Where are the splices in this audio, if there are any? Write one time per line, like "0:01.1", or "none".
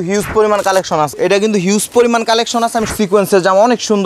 0:01.1
0:02.9